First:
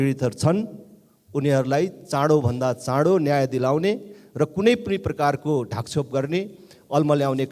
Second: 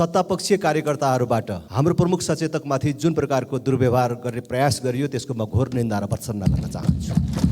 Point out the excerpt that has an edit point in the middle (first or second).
second